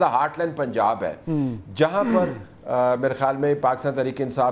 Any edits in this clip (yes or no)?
no